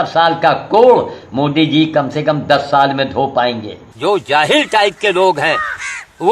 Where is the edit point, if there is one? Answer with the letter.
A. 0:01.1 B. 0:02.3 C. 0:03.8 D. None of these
C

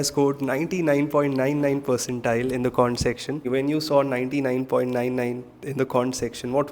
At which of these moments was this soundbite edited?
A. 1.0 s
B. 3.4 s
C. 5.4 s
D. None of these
B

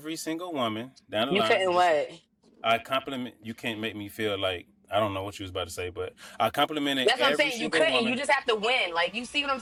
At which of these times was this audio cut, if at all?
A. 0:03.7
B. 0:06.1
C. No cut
C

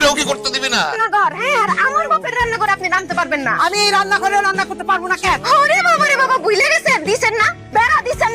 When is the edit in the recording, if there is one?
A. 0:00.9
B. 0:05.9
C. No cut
A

